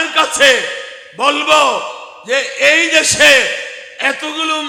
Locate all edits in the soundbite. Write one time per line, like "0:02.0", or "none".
none